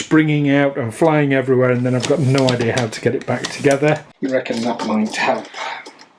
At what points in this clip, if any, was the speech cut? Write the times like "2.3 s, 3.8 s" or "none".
4.1 s